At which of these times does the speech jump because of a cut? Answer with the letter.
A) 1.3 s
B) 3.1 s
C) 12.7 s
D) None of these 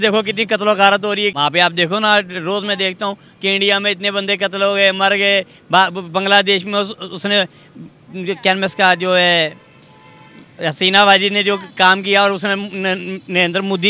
A